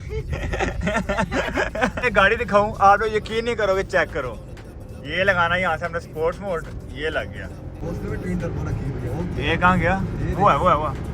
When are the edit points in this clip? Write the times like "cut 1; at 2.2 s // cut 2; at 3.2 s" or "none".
cut 1; at 2.0 s // cut 2; at 7.8 s